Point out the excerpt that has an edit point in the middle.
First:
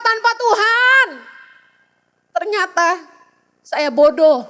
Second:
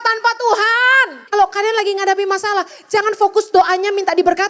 second; 1 cut; at 1.2 s

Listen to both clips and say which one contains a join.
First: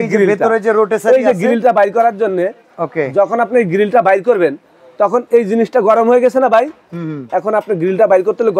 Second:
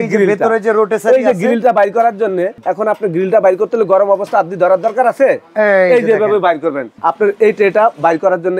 second; 2 cuts; at 2.6 s, 6.9 s

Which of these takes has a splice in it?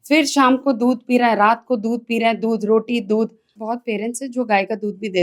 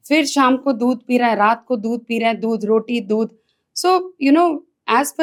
first; 1 cut; at 3.6 s

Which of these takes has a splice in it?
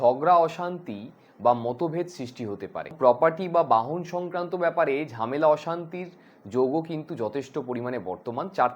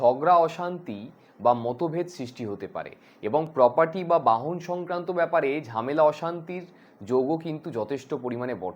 first; 1 cut; at 2.9 s

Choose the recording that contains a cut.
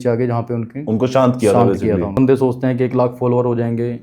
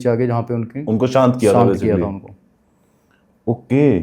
first; 1 cut; at 2.1 s

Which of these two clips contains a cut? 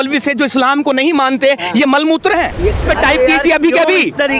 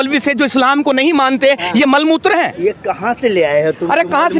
first; 1 cut; at 2.8 s

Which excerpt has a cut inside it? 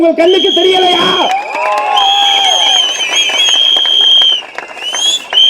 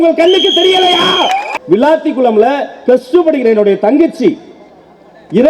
second; 1 cut; at 1.5 s

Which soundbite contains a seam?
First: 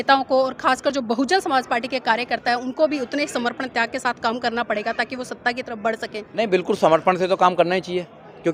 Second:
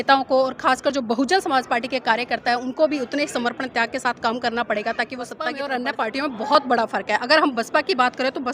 second; 1 cut; at 5.6 s

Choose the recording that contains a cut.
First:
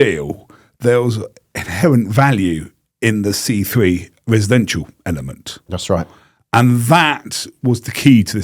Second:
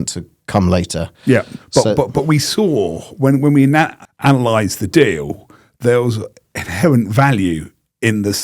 second; 1 cut; at 4.0 s

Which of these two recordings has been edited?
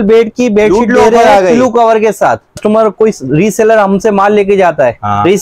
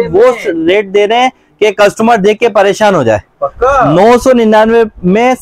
first; 1 cut; at 2.6 s

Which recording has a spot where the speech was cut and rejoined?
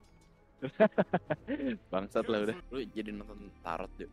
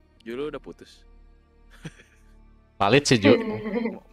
first; 1 cut; at 2.6 s

